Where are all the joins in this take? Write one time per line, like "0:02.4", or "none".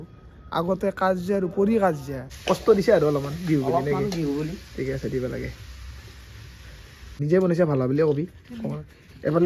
0:02.3
0:07.2